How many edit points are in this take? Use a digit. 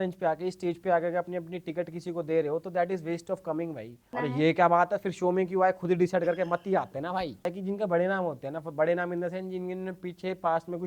2